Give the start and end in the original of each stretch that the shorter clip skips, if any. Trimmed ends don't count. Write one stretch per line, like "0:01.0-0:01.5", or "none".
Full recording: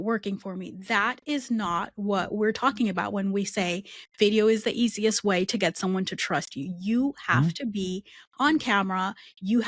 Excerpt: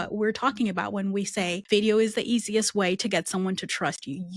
0:03.8-0:04.1